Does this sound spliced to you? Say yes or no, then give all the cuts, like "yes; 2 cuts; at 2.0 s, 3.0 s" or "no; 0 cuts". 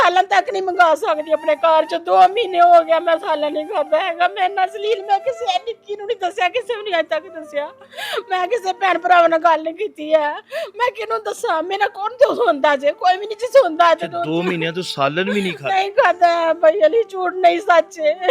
no; 0 cuts